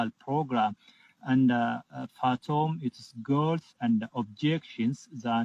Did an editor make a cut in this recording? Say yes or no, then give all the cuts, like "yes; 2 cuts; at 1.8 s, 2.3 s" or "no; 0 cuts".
no; 0 cuts